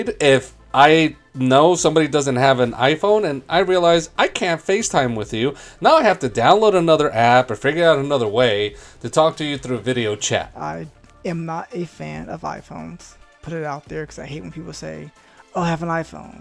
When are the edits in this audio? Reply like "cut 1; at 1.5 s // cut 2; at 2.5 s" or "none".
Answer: cut 1; at 10.5 s